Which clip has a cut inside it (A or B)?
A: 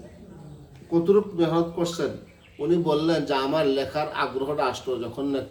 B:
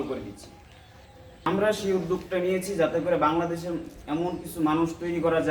B